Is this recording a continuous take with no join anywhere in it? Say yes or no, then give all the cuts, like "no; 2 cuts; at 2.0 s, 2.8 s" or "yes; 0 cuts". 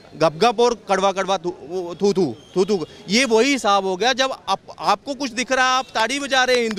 yes; 0 cuts